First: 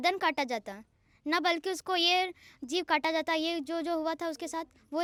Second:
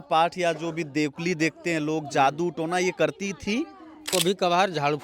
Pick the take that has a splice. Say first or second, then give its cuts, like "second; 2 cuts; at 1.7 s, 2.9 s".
second; 1 cut; at 4.1 s